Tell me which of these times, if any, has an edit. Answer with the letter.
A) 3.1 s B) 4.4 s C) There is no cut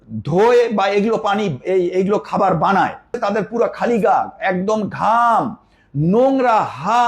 A